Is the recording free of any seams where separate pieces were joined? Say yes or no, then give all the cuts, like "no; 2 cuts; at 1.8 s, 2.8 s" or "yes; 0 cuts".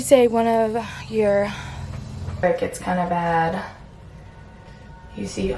no; 1 cut; at 2.4 s